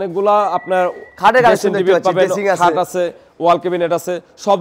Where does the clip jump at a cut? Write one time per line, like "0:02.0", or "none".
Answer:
none